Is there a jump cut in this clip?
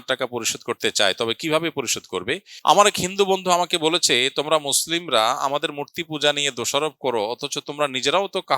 yes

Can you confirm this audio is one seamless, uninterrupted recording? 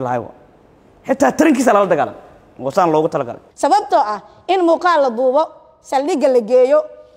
no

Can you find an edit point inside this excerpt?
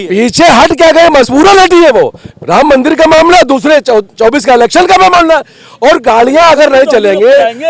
no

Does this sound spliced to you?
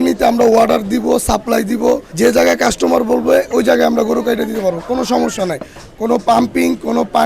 no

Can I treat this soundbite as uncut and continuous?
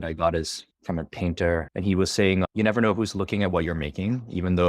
no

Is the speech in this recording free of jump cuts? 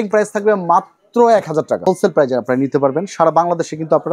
no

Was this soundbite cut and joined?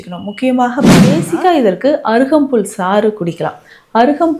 yes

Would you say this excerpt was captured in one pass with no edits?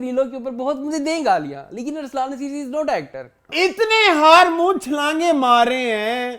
no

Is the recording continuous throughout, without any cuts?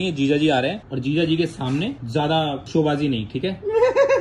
yes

